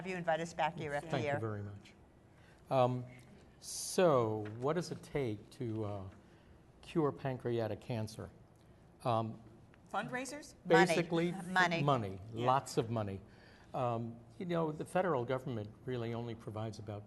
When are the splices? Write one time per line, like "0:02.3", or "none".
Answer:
0:11.9